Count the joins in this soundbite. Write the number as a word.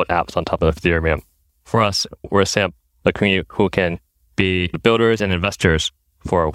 two